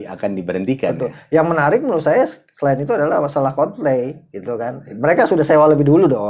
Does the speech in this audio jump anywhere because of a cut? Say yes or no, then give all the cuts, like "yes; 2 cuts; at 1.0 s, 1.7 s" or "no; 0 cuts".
no; 0 cuts